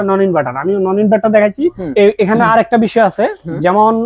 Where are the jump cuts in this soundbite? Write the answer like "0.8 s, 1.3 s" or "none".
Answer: 1.9 s